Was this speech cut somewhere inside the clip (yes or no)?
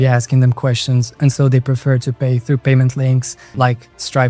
yes